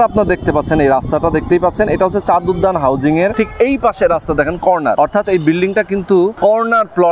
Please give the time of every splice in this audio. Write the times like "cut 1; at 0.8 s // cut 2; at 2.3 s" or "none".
cut 1; at 3.3 s // cut 2; at 4.9 s // cut 3; at 6.3 s